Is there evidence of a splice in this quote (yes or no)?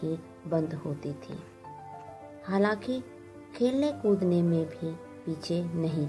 no